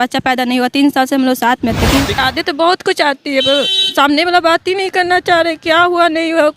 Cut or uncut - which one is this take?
cut